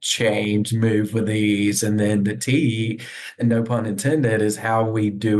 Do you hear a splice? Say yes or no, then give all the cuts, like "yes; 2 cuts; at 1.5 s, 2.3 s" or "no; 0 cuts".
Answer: yes; 1 cut; at 3.4 s